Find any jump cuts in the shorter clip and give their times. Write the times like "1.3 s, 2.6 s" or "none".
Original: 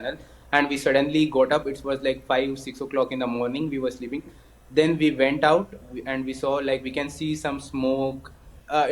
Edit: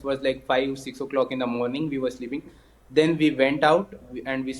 none